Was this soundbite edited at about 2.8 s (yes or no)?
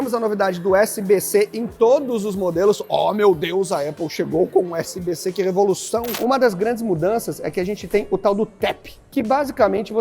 no